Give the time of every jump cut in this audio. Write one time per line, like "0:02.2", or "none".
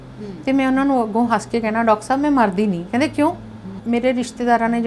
0:03.8